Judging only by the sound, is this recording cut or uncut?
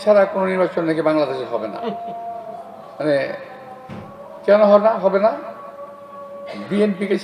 uncut